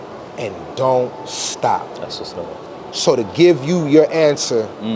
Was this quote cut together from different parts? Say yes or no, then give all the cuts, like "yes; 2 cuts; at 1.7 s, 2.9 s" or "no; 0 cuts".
no; 0 cuts